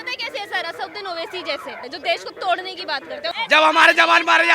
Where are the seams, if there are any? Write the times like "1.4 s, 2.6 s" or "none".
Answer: 1.8 s, 3.3 s